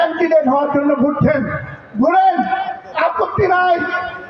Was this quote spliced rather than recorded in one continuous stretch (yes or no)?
no